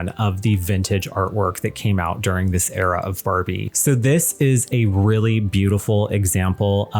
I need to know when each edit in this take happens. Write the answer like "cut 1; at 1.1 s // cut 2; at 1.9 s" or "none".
cut 1; at 3.7 s